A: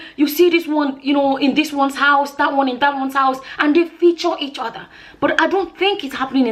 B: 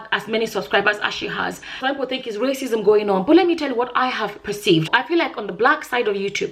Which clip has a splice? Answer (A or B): B